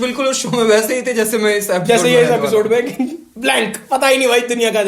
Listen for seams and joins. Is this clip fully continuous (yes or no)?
yes